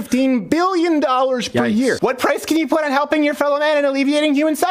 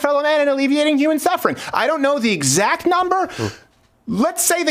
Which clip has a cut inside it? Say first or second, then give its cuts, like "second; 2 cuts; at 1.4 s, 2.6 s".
first; 1 cut; at 2.0 s